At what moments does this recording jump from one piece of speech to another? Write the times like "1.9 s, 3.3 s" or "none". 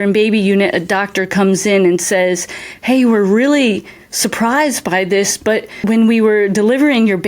5.8 s